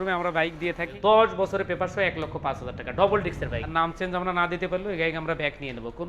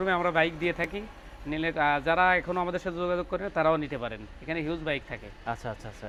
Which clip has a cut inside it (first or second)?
first